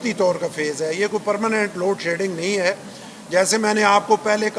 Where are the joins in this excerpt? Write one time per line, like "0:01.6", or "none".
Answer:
none